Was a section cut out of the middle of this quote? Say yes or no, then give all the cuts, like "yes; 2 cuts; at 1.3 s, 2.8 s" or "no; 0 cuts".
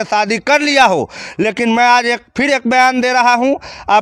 no; 0 cuts